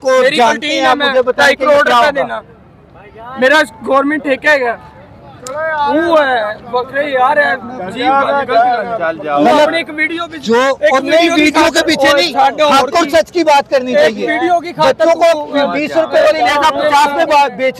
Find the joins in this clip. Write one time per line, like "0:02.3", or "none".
none